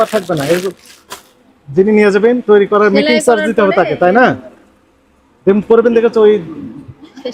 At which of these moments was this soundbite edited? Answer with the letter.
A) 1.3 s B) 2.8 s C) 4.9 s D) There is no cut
D